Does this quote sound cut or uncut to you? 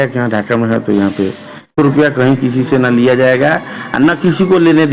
cut